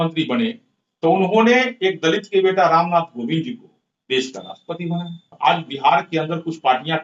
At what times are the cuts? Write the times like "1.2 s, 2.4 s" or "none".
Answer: 5.2 s